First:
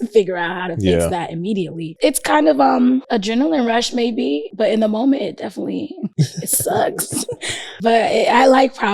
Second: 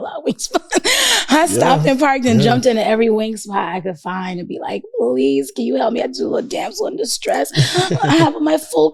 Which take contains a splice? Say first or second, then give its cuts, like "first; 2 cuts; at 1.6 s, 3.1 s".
first; 5 cuts; at 1.9 s, 3.1 s, 4.5 s, 6.0 s, 7.7 s